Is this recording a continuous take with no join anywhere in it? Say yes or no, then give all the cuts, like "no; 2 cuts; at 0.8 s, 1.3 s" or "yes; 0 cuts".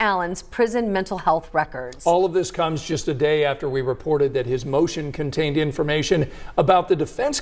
yes; 0 cuts